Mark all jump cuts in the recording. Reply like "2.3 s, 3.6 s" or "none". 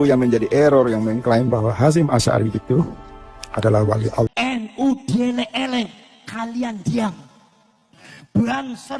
4.3 s